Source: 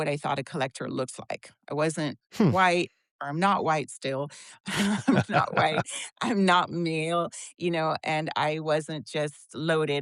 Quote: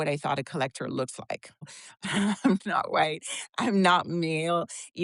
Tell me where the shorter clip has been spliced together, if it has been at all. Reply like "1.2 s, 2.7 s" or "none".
1.6 s